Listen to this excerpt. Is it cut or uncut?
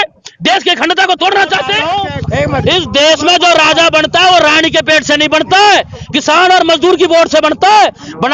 cut